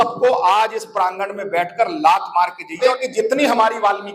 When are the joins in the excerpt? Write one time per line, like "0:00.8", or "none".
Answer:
0:03.0